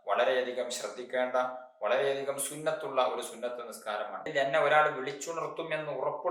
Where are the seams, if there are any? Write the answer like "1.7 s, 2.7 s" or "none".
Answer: 4.3 s